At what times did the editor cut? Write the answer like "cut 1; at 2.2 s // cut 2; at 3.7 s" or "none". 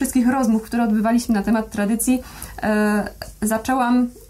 none